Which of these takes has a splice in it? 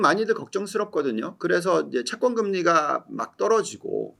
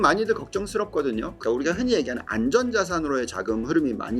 second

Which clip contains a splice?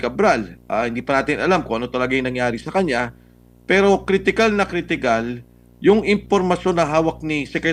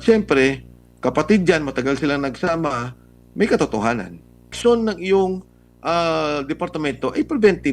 second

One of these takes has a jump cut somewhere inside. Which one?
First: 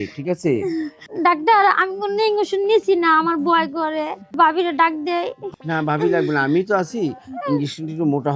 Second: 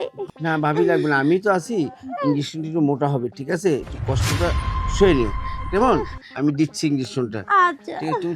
first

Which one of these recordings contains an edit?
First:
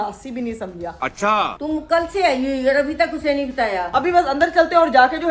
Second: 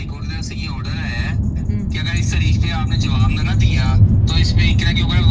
first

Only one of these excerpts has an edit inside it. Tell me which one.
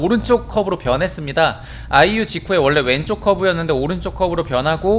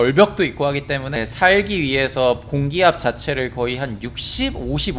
second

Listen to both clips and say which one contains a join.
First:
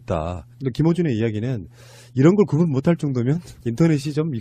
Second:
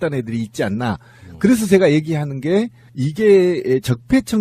first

